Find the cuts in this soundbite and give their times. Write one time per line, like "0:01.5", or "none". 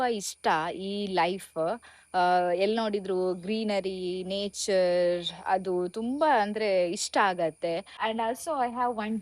0:08.0